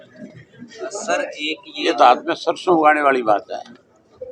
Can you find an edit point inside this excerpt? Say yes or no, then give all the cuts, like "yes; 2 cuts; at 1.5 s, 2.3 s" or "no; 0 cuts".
no; 0 cuts